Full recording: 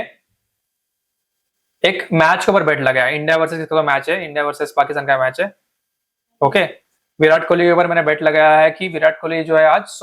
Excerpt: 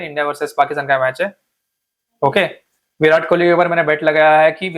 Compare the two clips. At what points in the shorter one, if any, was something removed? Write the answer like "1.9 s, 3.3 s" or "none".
none